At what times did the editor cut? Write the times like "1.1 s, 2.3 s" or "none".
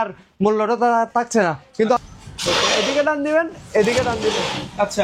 2.0 s